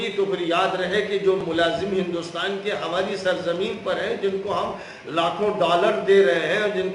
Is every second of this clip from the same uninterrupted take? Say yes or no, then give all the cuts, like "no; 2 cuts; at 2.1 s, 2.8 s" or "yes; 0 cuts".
yes; 0 cuts